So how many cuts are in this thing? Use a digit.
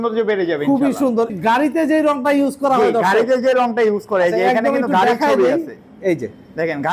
1